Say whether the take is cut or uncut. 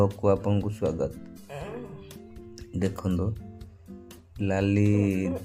uncut